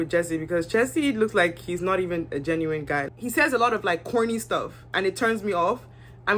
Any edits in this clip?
yes; 1 cut; at 3.1 s

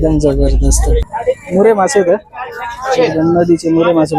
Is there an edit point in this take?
yes; 1 cut; at 1.1 s

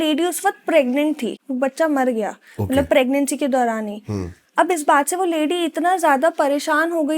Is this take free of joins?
no; 1 cut; at 1.4 s

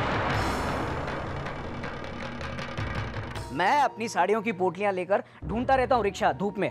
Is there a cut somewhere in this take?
yes; 1 cut; at 3.3 s

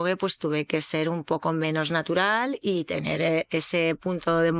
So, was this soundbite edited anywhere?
no; 0 cuts

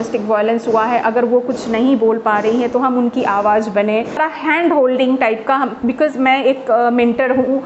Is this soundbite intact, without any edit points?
no; 1 cut; at 4.2 s

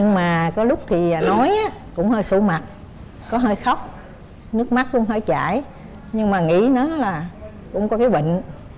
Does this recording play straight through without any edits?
yes; 0 cuts

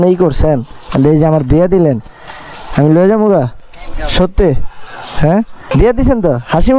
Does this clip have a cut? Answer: yes; 1 cut; at 5.7 s

